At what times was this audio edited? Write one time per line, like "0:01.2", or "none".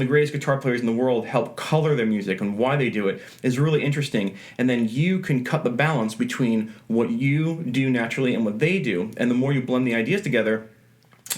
none